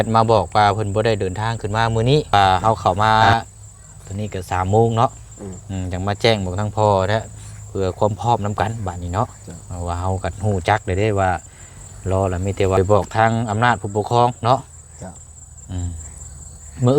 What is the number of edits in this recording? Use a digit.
2